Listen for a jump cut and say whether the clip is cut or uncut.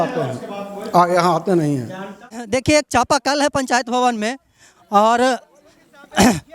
cut